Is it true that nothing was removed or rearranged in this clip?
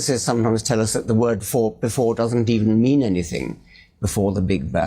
yes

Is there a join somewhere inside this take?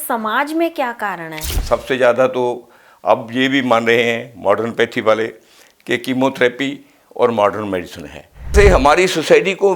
yes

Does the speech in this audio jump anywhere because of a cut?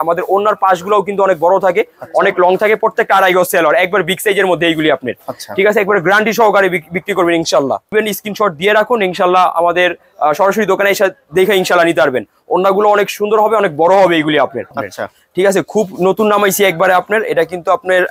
no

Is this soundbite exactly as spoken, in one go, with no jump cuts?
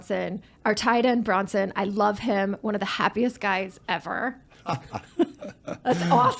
yes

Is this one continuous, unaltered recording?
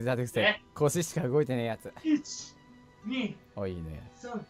no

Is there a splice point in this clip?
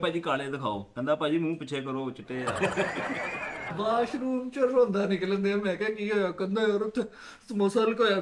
yes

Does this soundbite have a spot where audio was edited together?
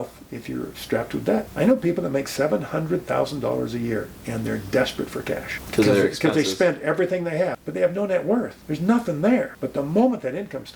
yes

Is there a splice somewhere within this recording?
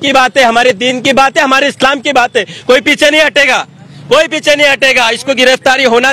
no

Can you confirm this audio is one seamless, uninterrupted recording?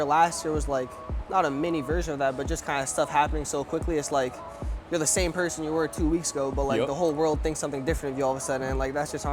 yes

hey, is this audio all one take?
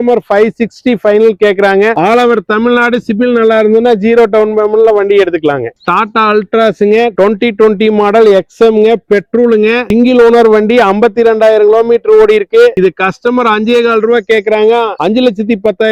yes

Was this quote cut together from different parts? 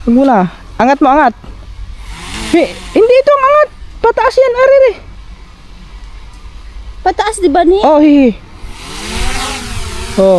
no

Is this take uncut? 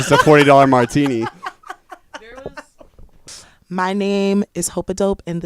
no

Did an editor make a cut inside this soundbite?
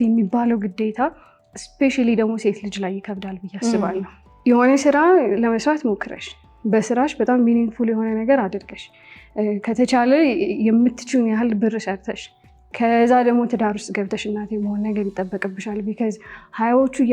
yes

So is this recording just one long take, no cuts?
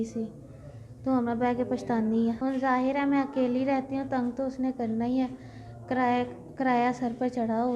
no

